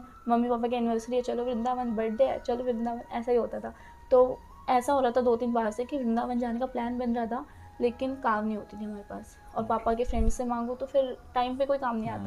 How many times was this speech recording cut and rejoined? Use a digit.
0